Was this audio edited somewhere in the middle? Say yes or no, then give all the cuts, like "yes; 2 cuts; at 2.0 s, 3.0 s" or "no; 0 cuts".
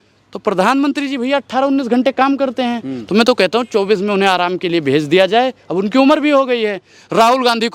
no; 0 cuts